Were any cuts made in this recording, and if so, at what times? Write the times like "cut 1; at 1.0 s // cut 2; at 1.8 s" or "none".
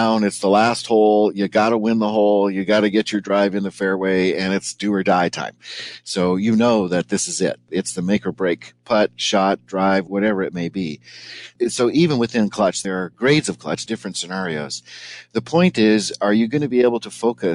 cut 1; at 7.7 s // cut 2; at 10.1 s // cut 3; at 11.4 s // cut 4; at 12.8 s // cut 5; at 13.8 s